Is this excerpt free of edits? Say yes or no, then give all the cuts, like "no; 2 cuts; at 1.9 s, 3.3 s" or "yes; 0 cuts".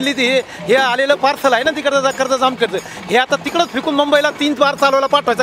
yes; 0 cuts